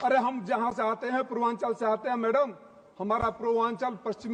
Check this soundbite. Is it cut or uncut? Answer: uncut